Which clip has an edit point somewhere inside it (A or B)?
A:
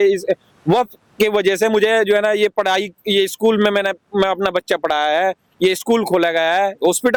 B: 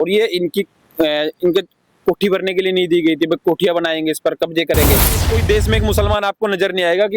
B